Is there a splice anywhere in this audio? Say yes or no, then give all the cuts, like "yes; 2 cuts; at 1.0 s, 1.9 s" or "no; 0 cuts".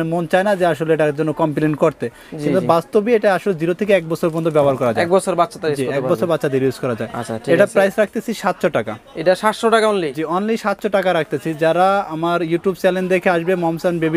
no; 0 cuts